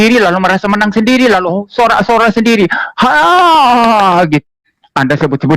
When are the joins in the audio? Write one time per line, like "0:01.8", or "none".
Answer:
0:04.4